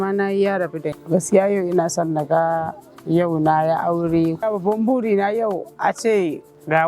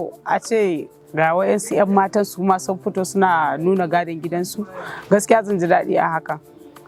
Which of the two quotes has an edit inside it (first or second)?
first